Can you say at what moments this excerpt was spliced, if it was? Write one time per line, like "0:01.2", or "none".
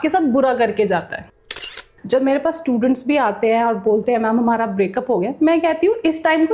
0:01.6